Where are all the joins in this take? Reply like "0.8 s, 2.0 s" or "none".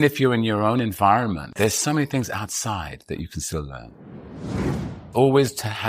1.5 s, 4.5 s